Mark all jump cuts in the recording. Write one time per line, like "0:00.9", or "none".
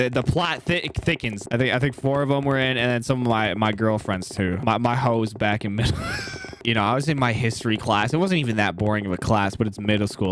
0:01.4
0:06.6